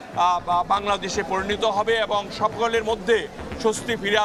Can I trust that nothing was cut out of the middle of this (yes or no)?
yes